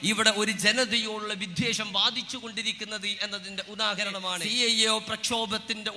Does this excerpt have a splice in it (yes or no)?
yes